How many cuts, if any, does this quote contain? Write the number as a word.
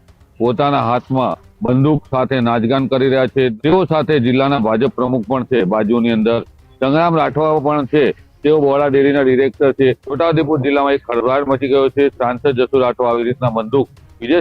two